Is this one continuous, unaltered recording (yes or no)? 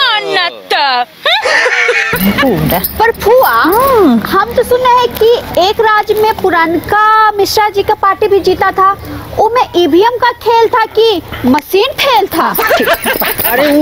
yes